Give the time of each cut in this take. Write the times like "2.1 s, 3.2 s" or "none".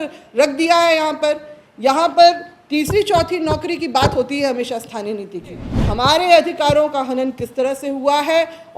5.7 s